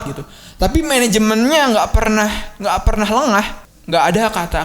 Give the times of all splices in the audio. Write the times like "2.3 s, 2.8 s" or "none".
3.6 s

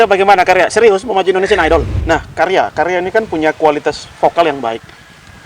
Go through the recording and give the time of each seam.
1.9 s

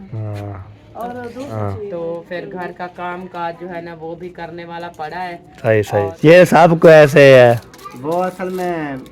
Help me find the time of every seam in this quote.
1.5 s, 6.1 s

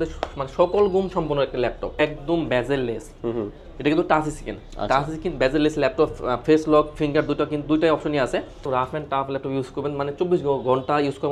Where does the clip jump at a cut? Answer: 2.0 s, 8.6 s

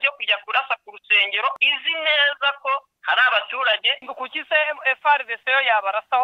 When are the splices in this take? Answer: 1.5 s, 2.9 s, 4.0 s

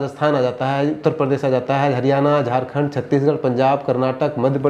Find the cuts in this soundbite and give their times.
none

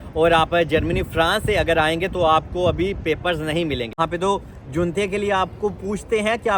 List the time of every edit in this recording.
4.0 s

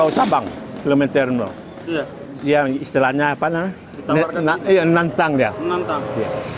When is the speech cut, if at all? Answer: none

